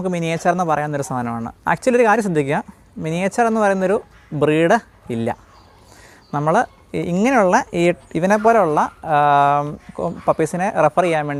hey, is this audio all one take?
yes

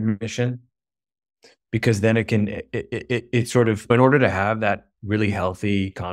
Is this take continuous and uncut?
yes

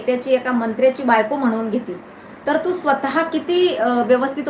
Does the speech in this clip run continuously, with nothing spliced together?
yes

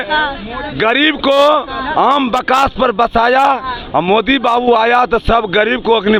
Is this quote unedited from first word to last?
yes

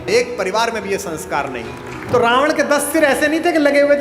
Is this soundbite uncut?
no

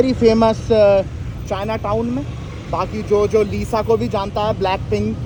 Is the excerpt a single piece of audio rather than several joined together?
yes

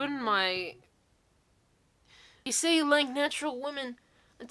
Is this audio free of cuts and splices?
no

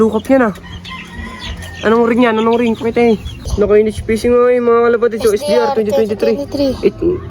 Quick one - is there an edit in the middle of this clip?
yes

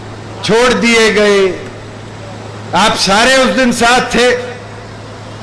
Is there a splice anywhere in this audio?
no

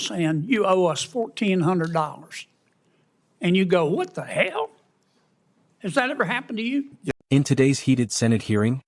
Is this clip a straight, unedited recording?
yes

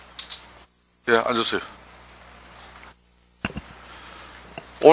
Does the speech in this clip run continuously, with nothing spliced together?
no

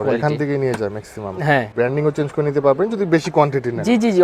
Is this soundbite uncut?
no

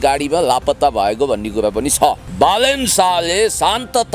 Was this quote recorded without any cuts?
no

